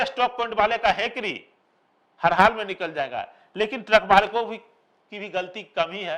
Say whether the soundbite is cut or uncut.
uncut